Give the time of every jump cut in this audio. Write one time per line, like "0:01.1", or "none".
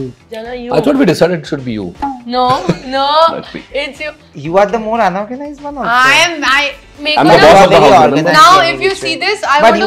none